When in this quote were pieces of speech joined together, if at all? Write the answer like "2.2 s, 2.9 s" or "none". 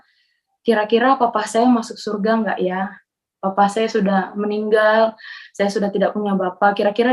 none